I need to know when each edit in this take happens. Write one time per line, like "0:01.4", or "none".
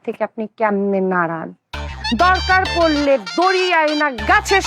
none